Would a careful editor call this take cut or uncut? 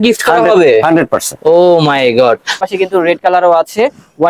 cut